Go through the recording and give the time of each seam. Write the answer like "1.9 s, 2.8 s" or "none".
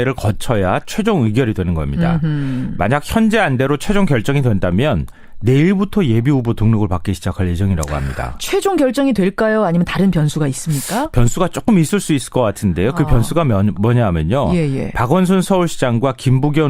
5.3 s